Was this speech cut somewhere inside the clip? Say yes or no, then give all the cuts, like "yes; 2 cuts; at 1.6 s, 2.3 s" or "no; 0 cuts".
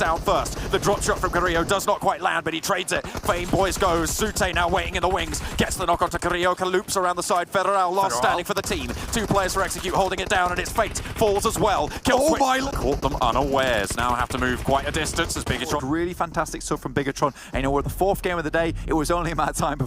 yes; 2 cuts; at 12.6 s, 15.8 s